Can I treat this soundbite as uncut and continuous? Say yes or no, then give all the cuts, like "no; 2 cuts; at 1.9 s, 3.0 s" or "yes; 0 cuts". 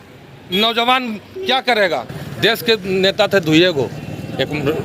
no; 1 cut; at 2.2 s